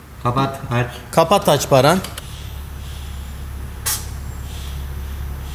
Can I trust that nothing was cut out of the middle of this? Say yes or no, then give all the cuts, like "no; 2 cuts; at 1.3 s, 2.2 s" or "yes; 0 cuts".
no; 1 cut; at 2.2 s